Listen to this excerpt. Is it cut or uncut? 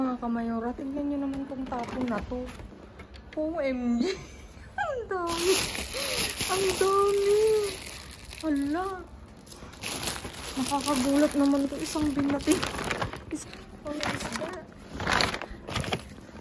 cut